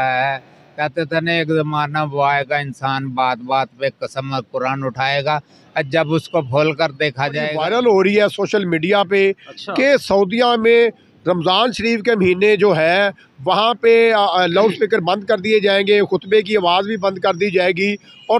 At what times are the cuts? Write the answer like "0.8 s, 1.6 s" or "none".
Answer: 7.5 s